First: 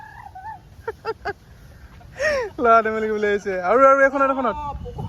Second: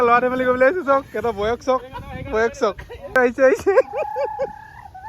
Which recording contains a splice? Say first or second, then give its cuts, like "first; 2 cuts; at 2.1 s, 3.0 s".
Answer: second; 1 cut; at 3.2 s